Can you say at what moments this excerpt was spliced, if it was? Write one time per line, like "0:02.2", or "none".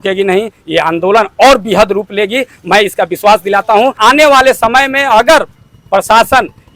0:04.0